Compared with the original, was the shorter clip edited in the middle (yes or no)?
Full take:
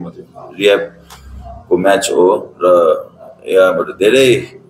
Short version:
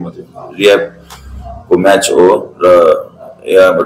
no